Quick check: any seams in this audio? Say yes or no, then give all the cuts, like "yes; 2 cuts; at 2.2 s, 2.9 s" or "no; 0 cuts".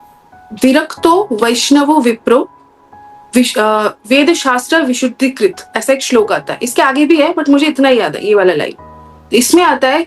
no; 0 cuts